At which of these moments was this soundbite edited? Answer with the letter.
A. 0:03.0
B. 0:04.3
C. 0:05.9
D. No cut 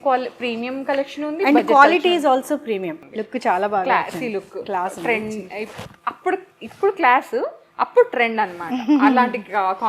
A